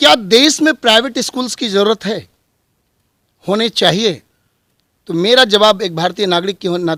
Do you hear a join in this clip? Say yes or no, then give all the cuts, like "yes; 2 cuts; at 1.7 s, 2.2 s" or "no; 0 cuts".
no; 0 cuts